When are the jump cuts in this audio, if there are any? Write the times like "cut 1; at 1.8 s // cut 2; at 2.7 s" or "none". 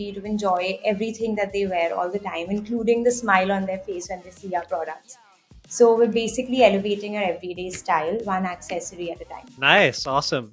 none

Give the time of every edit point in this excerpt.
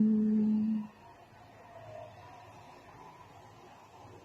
cut 1; at 1.0 s

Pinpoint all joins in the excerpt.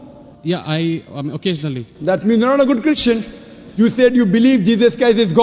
cut 1; at 3.6 s

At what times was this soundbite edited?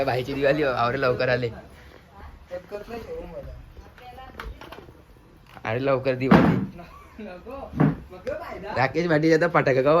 none

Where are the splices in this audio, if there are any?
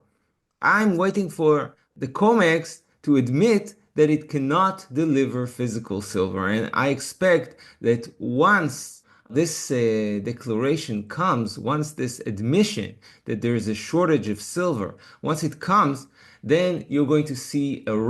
none

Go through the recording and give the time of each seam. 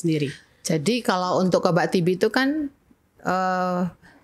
none

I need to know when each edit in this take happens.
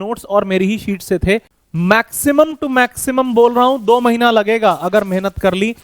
cut 1; at 1.5 s

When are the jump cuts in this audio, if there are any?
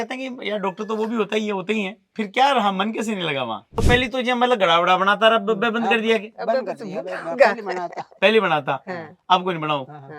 cut 1; at 3.8 s

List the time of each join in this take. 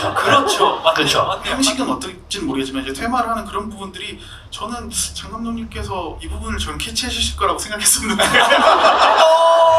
cut 1; at 1.4 s // cut 2; at 6.2 s

